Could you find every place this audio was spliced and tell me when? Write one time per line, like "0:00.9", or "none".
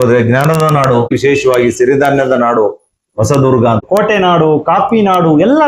0:01.1
0:03.8